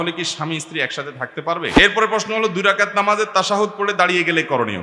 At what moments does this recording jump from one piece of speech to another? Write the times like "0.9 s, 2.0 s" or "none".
1.7 s